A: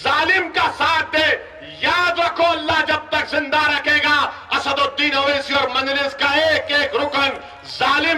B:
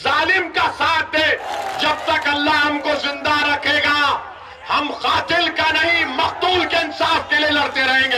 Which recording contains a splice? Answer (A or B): B